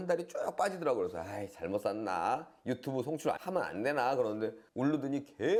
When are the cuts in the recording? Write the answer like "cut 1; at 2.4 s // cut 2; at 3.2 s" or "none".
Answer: none